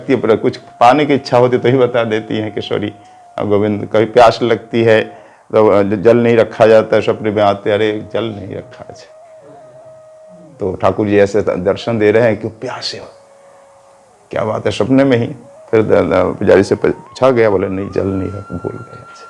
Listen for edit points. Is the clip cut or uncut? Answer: uncut